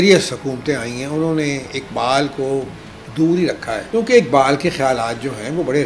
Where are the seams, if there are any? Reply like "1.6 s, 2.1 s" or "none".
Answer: 3.8 s